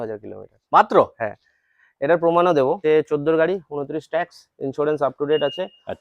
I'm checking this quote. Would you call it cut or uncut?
cut